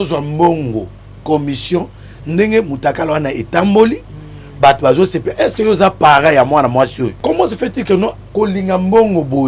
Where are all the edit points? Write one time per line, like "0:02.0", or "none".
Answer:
0:07.1